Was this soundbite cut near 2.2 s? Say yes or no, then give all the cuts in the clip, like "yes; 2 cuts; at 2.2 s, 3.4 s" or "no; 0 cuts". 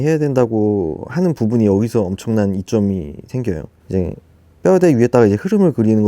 no; 1 cut; at 3.7 s